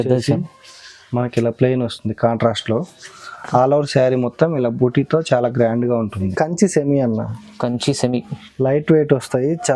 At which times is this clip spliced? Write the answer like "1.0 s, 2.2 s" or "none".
6.3 s